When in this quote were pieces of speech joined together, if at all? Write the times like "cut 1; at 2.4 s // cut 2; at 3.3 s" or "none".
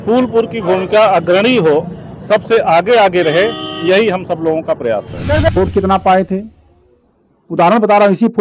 cut 1; at 5.5 s

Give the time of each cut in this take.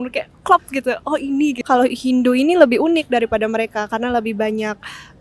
cut 1; at 1.6 s

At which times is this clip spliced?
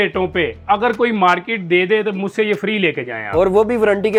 none

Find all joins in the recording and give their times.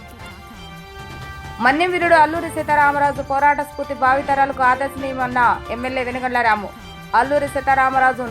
cut 1; at 0.9 s

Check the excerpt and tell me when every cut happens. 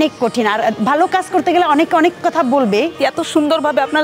cut 1; at 2.9 s

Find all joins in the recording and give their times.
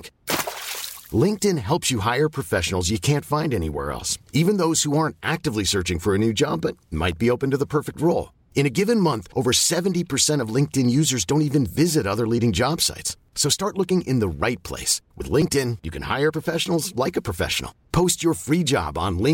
none

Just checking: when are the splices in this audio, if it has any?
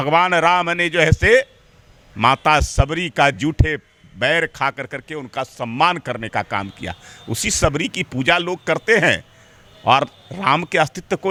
none

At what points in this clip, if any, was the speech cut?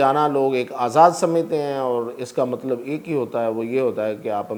none

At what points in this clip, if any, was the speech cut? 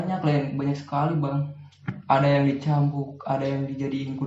none

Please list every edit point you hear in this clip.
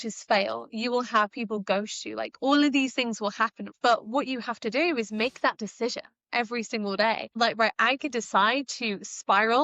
cut 1; at 3.6 s // cut 2; at 7.4 s

